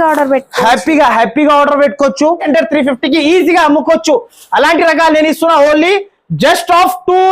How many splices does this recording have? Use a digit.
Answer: 1